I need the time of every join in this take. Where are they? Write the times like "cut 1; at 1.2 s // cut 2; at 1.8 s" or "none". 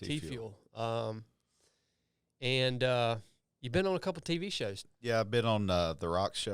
cut 1; at 4.9 s